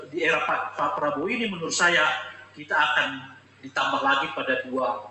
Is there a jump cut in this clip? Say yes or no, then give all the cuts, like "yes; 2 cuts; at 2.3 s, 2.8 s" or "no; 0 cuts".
no; 0 cuts